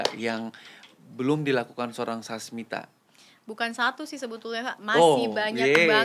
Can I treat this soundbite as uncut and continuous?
yes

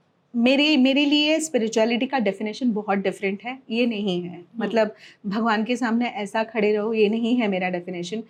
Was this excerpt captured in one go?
yes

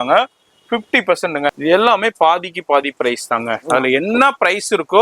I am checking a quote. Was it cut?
yes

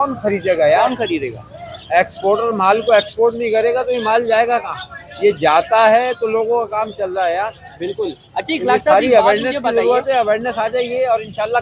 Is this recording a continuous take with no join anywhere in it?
yes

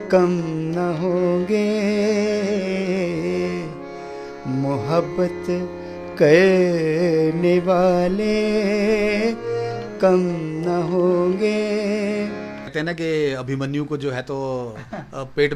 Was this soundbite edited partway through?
yes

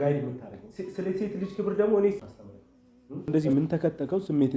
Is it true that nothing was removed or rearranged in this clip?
no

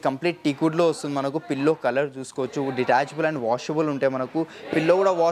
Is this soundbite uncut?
yes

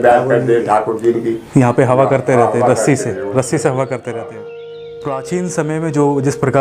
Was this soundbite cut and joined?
yes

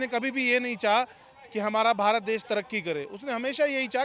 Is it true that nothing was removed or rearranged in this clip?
yes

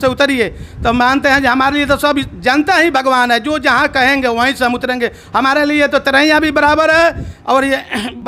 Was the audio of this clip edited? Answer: no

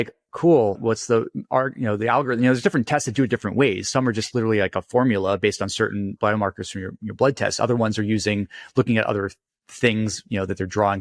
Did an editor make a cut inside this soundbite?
yes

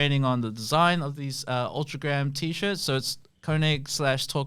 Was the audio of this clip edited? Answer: no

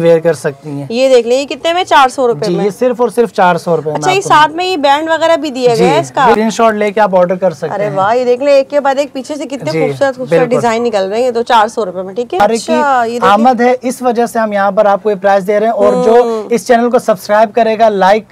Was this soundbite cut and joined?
yes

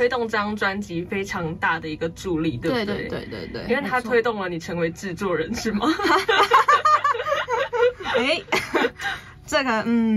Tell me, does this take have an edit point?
no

